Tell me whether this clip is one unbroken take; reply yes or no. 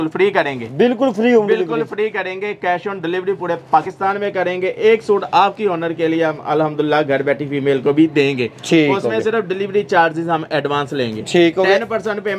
yes